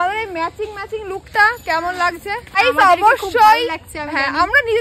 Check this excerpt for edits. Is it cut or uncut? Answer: cut